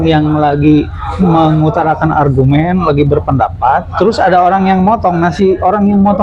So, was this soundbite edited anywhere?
no; 0 cuts

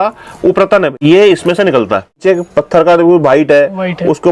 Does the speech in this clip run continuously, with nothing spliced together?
no; 1 cut; at 2.2 s

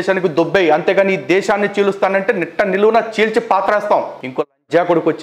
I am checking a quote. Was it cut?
yes; 1 cut; at 4.2 s

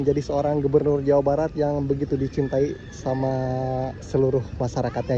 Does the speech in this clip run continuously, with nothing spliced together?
yes; 0 cuts

